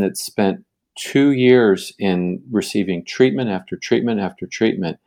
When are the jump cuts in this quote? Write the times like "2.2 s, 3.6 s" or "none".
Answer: none